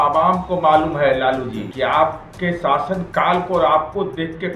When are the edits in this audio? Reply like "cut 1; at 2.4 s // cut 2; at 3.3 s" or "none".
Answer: cut 1; at 1.7 s // cut 2; at 2.3 s